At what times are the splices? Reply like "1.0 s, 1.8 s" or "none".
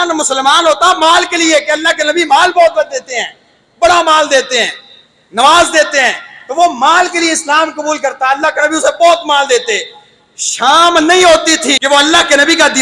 11.8 s